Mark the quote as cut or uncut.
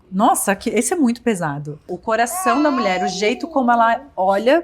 cut